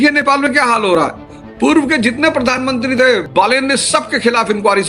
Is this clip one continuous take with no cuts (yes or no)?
no